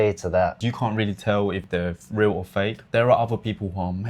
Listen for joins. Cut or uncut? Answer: uncut